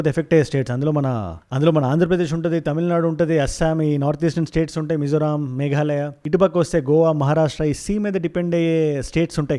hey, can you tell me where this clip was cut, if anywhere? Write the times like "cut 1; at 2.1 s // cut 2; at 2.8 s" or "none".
none